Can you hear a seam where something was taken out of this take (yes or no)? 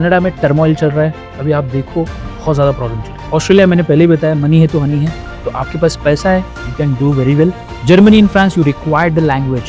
no